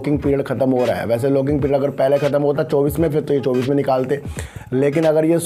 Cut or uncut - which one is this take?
uncut